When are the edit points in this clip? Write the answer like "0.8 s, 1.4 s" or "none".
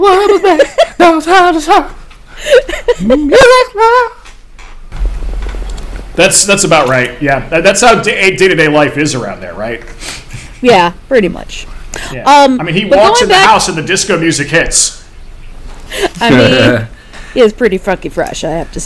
4.9 s